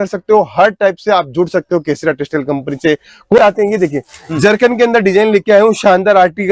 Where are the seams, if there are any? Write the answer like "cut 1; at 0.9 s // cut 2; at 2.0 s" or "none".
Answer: cut 1; at 3.4 s